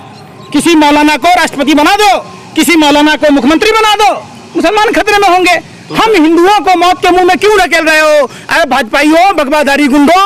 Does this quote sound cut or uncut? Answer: uncut